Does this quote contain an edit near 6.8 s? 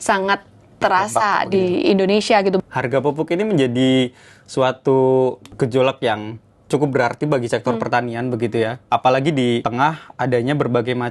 no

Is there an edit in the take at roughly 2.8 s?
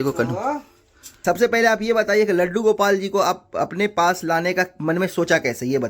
no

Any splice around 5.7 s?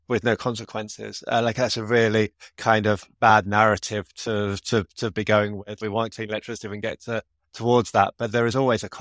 yes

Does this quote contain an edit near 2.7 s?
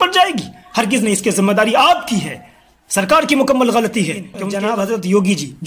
no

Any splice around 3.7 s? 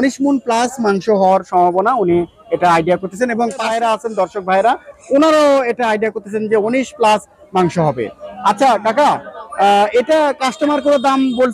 yes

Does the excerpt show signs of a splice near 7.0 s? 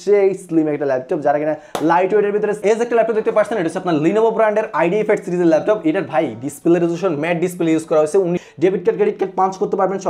no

